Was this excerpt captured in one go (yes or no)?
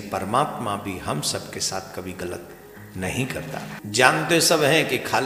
no